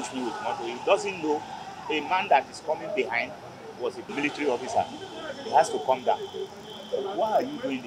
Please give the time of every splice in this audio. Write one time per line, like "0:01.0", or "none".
0:04.1

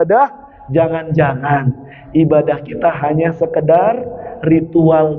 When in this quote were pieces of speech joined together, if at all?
none

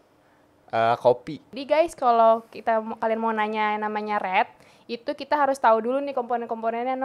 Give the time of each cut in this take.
0:01.6

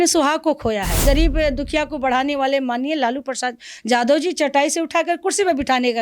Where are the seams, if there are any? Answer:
0:01.0

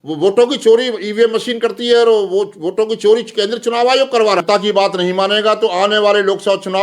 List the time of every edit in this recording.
0:04.4

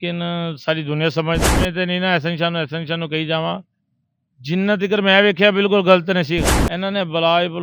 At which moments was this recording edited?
0:01.4
0:06.6

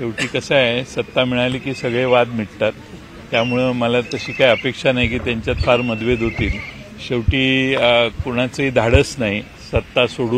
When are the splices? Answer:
0:01.6

